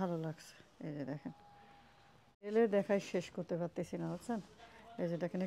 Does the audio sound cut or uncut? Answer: cut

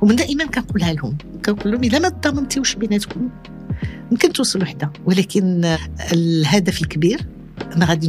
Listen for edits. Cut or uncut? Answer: cut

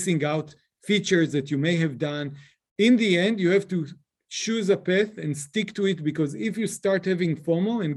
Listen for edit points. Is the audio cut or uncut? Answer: uncut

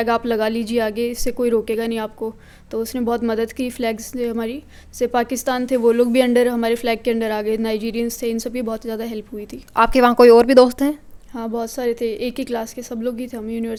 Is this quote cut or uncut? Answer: uncut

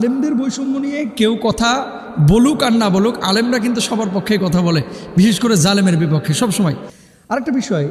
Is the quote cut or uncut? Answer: uncut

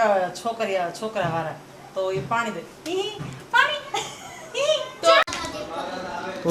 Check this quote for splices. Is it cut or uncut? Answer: cut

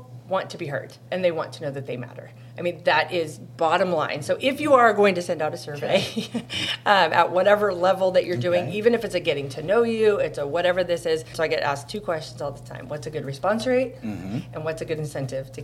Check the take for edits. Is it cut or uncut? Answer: cut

